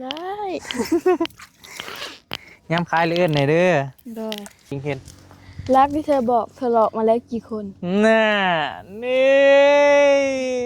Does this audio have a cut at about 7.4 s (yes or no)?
no